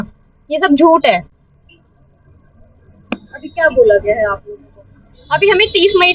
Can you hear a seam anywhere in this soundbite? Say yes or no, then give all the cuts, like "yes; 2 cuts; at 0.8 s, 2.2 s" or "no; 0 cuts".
no; 0 cuts